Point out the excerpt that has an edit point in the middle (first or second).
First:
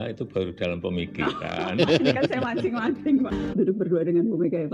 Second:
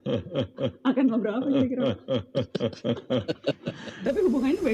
first